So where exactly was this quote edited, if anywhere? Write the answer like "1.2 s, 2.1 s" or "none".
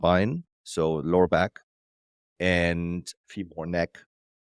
3.2 s